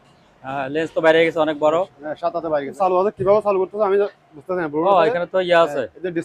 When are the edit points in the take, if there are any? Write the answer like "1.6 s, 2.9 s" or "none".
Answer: 2.7 s